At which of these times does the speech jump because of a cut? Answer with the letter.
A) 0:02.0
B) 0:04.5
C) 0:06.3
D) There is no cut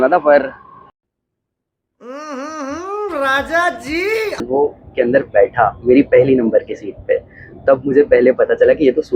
B